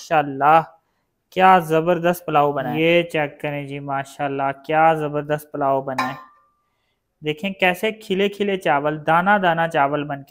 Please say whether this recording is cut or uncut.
cut